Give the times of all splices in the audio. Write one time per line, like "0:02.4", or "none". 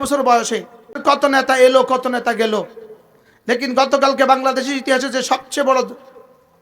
0:01.0